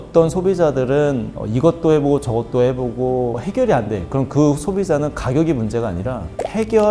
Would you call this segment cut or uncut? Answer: uncut